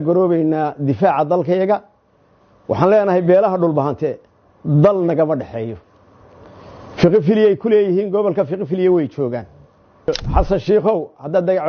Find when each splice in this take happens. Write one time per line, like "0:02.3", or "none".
0:10.1